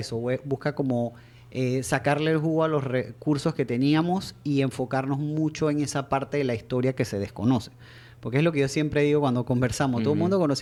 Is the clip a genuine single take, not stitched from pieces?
yes; 0 cuts

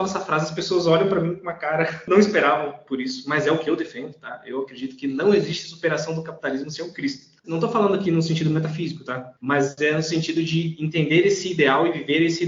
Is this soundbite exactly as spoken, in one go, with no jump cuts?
no; 1 cut; at 7.5 s

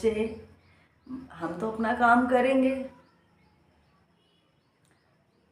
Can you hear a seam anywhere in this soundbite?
no; 0 cuts

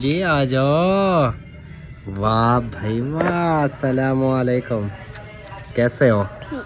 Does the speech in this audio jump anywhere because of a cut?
no; 0 cuts

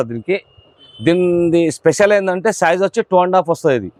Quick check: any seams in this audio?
no; 0 cuts

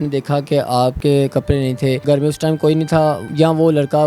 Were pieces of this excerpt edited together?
yes; 3 cuts; at 1.0 s, 2.0 s, 3.2 s

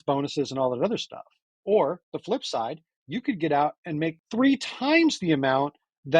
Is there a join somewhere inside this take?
yes; 1 cut; at 4.2 s

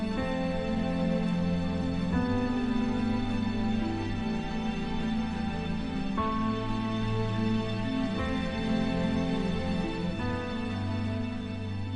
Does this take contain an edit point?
yes; 1 cut; at 4.7 s

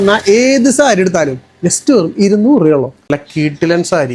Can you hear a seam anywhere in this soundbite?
yes; 1 cut; at 3.1 s

